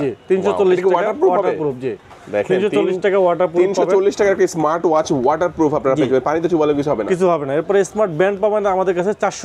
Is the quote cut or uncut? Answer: uncut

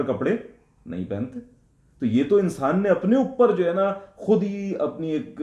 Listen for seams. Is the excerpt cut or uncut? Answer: uncut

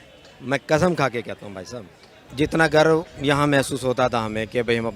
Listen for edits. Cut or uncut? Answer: cut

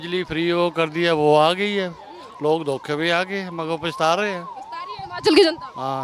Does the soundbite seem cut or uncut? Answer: uncut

